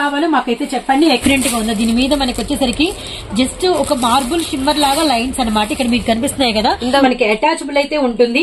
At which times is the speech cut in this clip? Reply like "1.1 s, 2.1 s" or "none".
1.2 s, 7.0 s

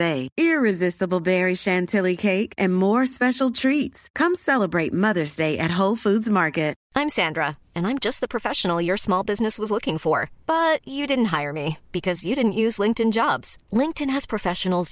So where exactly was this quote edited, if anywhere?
6.8 s

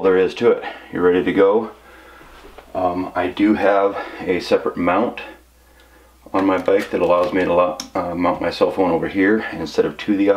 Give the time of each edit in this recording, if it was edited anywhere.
0.9 s

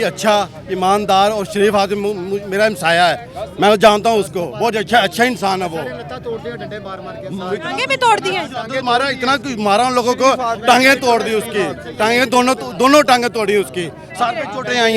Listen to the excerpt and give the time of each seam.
none

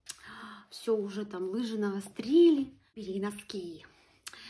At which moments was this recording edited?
2.9 s

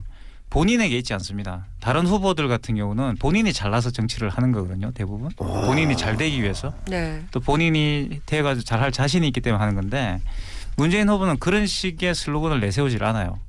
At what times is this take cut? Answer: 1.1 s

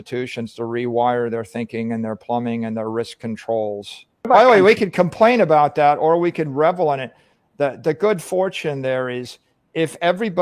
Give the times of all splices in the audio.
4.3 s

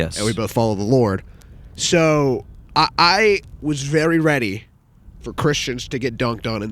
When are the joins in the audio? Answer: 2.6 s

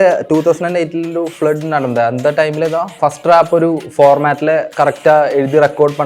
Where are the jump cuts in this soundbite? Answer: 3.0 s, 4.7 s

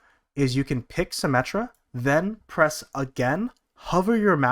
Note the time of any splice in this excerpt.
1.8 s

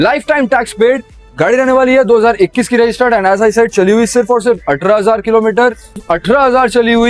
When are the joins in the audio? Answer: none

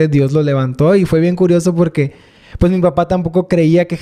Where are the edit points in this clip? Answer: none

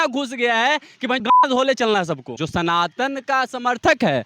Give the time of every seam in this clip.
2.3 s

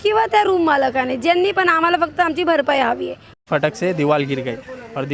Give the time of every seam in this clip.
3.2 s

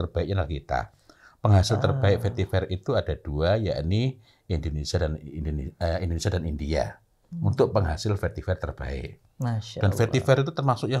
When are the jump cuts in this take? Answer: none

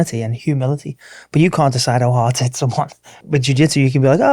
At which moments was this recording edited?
3.2 s

